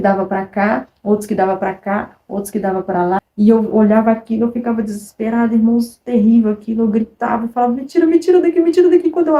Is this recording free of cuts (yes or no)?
no